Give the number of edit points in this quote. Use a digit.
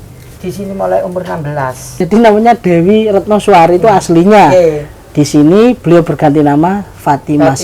1